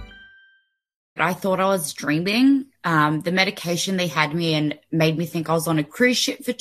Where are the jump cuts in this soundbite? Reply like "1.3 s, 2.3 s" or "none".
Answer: 1.2 s